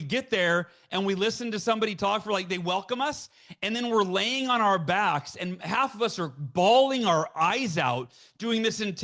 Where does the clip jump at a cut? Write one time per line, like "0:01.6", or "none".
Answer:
none